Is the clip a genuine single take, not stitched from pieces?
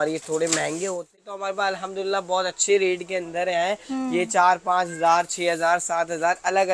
no; 1 cut; at 1.3 s

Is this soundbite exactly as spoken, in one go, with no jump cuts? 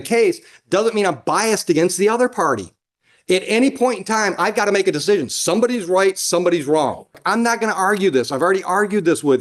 no; 1 cut; at 7.2 s

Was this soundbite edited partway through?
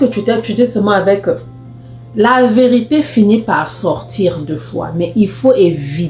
no; 0 cuts

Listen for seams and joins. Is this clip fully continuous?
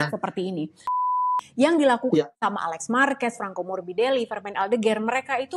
no; 1 cut; at 1.3 s

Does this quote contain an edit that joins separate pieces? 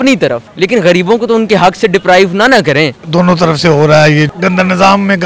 no; 0 cuts

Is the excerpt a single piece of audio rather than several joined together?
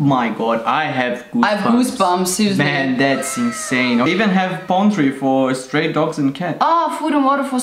no; 1 cut; at 4.1 s

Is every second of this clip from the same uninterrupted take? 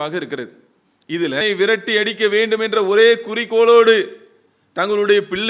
no; 1 cut; at 1.4 s

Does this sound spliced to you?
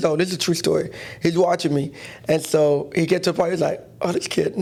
no; 0 cuts

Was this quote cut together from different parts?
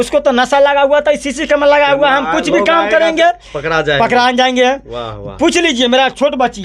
no; 0 cuts

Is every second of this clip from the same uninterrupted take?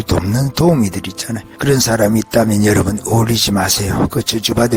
yes; 0 cuts

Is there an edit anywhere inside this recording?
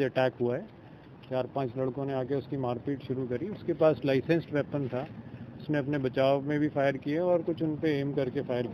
no; 0 cuts

